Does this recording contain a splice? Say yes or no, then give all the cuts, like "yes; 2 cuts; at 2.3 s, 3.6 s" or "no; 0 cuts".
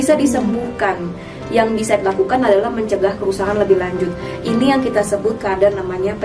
no; 0 cuts